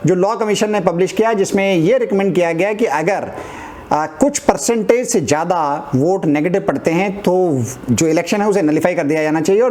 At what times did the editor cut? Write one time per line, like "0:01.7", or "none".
none